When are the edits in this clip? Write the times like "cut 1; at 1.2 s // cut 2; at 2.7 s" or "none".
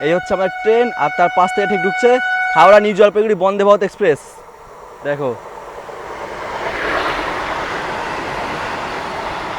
none